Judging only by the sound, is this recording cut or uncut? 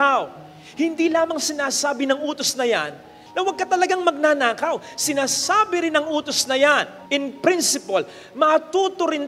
uncut